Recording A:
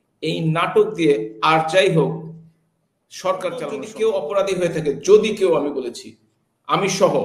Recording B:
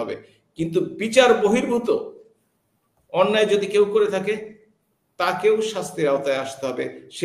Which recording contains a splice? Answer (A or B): A